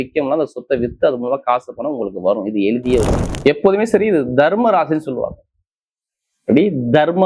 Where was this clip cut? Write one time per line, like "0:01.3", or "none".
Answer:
0:03.2